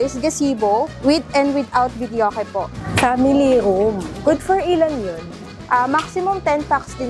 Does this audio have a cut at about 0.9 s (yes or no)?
yes